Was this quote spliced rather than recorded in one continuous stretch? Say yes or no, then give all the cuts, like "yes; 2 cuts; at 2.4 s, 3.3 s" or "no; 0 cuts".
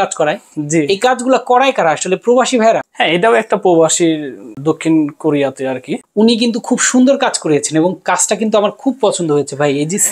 yes; 3 cuts; at 2.9 s, 4.5 s, 5.9 s